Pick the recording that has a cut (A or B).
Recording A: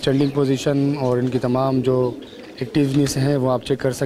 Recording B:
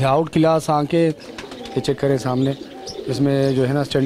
B